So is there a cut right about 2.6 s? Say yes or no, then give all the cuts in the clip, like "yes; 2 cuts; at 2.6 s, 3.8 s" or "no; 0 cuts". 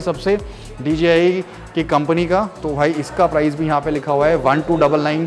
no; 0 cuts